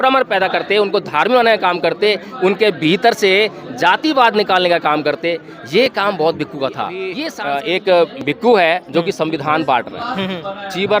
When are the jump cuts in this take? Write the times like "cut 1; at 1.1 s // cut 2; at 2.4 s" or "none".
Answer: cut 1; at 7.2 s